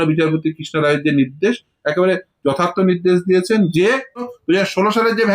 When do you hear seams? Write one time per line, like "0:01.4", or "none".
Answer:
0:04.3